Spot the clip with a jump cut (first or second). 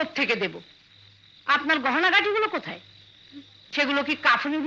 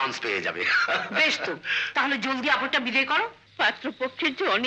second